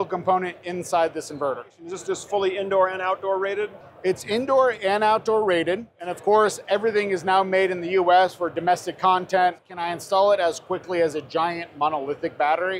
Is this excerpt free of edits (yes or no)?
no